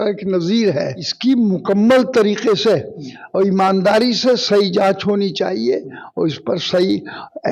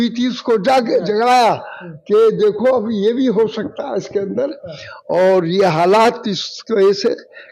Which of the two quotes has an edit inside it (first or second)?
first